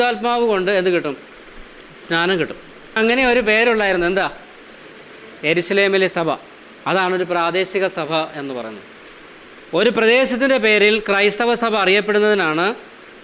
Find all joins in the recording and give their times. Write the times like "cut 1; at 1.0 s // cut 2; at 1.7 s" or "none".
cut 1; at 3.0 s